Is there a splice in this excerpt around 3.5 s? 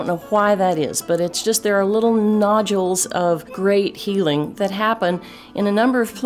yes; 1 cut; at 3.5 s

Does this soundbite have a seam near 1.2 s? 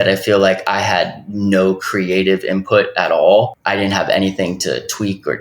no; 1 cut; at 3.6 s

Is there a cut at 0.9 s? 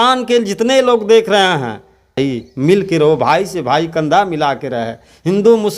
no; 1 cut; at 2.2 s

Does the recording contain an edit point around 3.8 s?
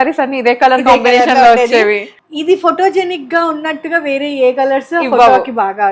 no; 1 cut; at 2.1 s

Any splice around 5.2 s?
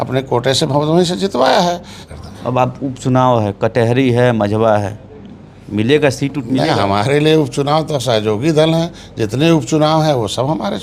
no; 1 cut; at 2.0 s

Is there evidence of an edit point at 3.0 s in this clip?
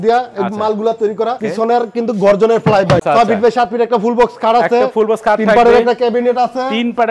yes; 2 cuts; at 1.4 s, 3.0 s

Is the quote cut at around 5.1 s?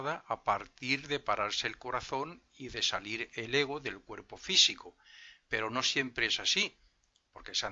no; 1 cut; at 1.2 s

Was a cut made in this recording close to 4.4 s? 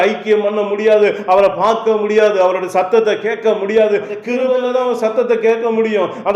yes; 1 cut; at 4.4 s

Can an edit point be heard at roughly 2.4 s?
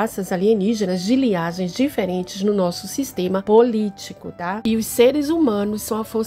no; 1 cut; at 4.5 s

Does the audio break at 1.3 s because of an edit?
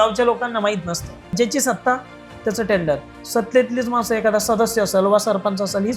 yes; 1 cut; at 1.3 s

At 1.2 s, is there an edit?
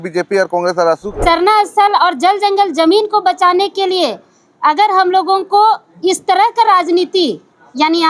yes; 1 cut; at 1.2 s

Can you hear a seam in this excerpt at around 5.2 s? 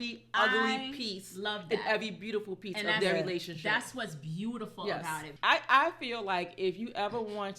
yes; 1 cut; at 5.2 s

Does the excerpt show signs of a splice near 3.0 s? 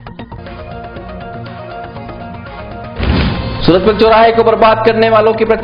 yes; 1 cut; at 3.0 s

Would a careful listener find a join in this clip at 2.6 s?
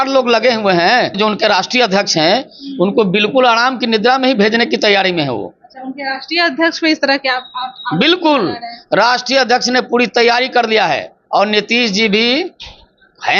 no; 2 cuts; at 1.2 s, 11.1 s

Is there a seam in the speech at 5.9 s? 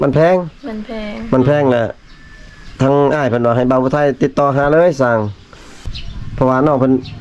yes; 1 cut; at 5.9 s

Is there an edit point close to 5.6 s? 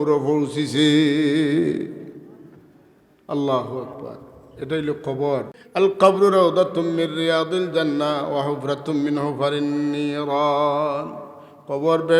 yes; 1 cut; at 5.6 s

